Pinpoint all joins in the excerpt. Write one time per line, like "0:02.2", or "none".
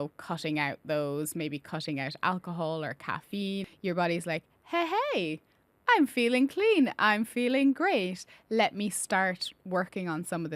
0:03.7